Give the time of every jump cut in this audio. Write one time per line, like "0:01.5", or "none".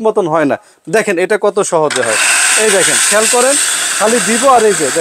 none

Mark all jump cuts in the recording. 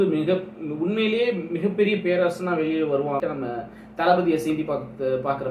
0:03.2

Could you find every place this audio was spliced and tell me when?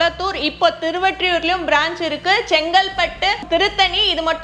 0:03.4

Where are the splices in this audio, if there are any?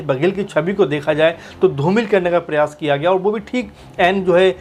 none

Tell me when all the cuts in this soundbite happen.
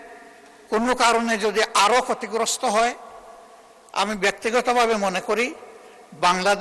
none

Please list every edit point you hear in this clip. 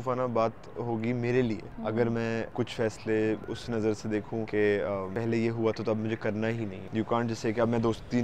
0:01.7
0:02.5
0:03.5
0:04.5
0:05.1
0:06.8

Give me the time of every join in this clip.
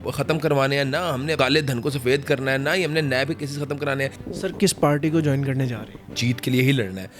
0:01.3
0:04.2
0:06.1

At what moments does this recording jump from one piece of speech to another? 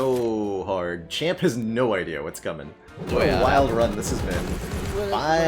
0:02.9

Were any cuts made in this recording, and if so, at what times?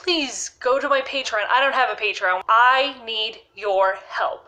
0:02.4

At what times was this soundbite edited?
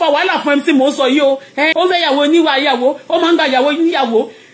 0:01.7

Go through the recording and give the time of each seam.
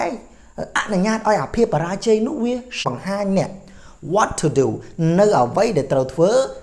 0:02.8

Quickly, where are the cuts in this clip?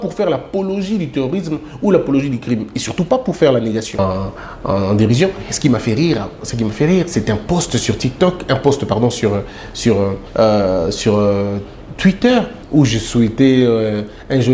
0:04.0
0:10.2
0:12.6

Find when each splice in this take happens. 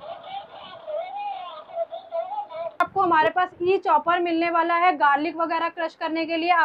0:02.9

